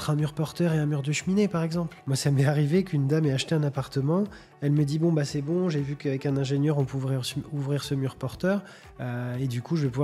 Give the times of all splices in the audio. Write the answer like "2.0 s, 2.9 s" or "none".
2.0 s